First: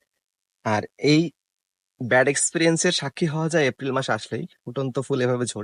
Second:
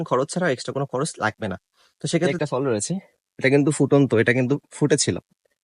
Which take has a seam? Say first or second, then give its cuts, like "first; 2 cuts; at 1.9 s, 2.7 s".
second; 1 cut; at 2.3 s